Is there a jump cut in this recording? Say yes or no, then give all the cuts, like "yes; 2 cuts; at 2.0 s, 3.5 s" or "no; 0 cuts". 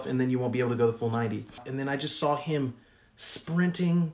yes; 1 cut; at 1.6 s